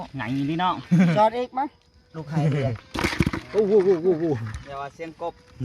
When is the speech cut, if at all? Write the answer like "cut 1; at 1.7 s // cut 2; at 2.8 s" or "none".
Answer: cut 1; at 2.1 s